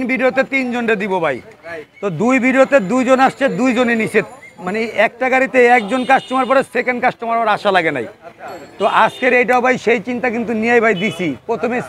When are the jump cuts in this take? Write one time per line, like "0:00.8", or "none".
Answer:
none